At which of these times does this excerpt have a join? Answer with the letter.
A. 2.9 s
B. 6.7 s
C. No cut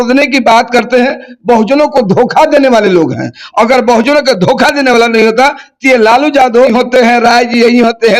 B